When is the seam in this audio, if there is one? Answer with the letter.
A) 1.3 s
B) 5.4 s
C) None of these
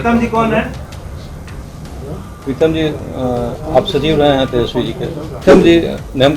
B